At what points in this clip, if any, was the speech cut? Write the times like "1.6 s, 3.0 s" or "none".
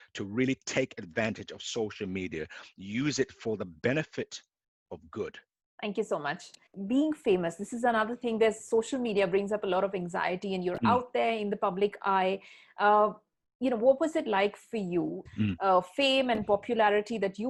none